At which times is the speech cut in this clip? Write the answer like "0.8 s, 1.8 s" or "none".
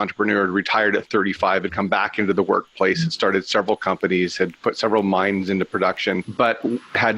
6.3 s